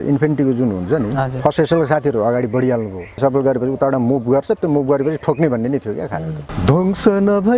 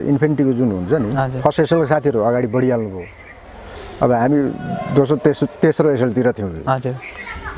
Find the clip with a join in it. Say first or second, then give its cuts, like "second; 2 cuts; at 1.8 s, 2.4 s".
first; 2 cuts; at 3.2 s, 6.4 s